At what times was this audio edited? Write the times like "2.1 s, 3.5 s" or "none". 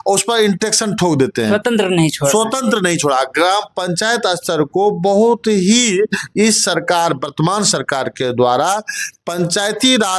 none